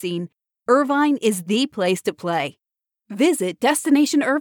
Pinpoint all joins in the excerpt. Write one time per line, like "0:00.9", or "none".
none